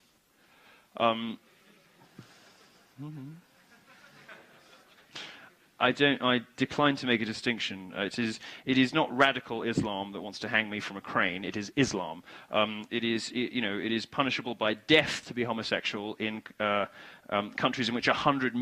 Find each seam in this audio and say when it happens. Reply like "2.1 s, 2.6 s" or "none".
3.9 s